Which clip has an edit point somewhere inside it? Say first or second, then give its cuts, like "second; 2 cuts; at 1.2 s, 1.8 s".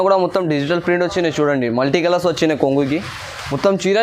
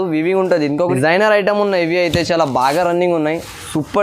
second; 1 cut; at 0.9 s